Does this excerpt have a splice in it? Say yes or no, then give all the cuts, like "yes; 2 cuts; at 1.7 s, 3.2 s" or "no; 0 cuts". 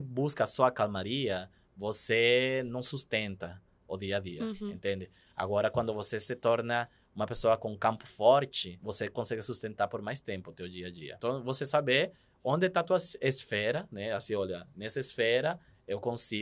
yes; 2 cuts; at 8.8 s, 11.0 s